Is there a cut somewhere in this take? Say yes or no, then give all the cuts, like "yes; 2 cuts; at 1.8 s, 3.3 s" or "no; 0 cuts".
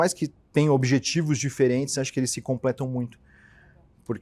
no; 0 cuts